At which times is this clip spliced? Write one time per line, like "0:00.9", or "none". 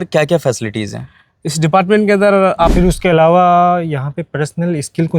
0:02.7